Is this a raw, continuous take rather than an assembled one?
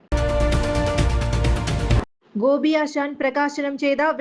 yes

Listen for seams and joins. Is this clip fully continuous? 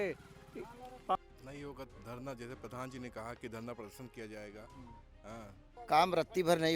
no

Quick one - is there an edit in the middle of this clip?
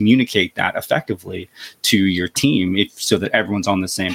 no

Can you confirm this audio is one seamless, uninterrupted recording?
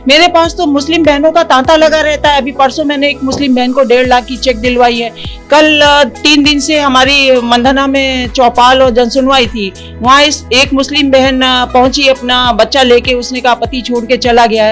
yes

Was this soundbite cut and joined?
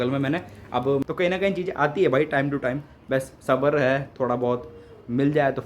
yes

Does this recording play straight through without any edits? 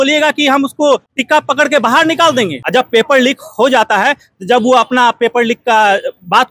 no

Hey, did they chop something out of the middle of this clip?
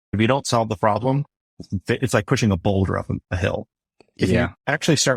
no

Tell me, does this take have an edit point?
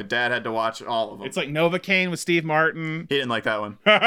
yes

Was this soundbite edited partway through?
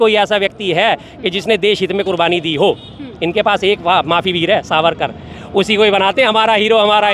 no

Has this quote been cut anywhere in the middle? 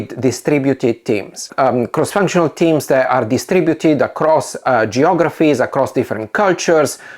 yes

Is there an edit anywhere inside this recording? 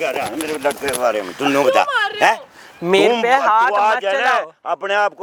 no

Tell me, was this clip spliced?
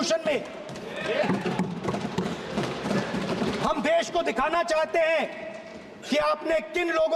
yes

